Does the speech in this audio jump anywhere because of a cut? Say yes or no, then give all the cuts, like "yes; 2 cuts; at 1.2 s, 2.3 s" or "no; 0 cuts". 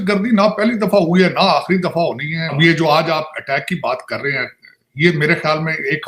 yes; 1 cut; at 2.6 s